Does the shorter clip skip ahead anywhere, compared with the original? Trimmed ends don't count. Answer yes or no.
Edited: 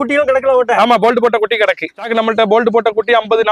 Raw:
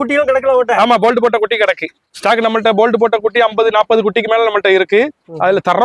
yes